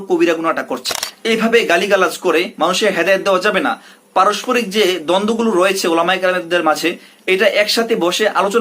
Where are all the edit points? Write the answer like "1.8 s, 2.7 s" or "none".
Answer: 1.1 s